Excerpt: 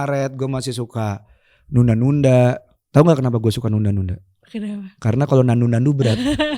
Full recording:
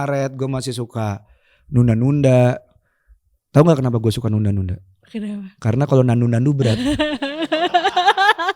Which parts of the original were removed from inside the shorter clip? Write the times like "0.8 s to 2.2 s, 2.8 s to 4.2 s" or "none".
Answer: 2.7 s to 3.3 s